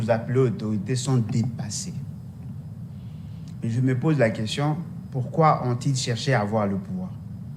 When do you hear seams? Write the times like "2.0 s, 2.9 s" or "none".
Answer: none